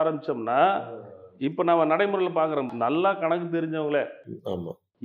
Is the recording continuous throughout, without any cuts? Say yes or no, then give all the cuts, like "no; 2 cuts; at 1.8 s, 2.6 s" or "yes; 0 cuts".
no; 1 cut; at 2.7 s